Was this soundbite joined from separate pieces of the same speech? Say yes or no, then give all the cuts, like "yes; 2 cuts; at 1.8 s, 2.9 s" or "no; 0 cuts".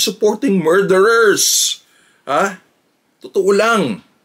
no; 0 cuts